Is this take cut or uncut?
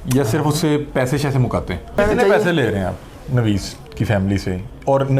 cut